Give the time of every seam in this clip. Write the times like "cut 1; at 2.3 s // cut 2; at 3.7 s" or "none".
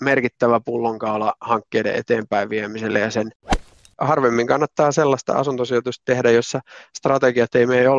cut 1; at 3.6 s